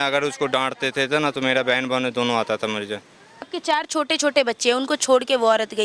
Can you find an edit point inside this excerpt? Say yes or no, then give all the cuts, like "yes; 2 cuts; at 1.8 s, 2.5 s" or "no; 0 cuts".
yes; 1 cut; at 3.5 s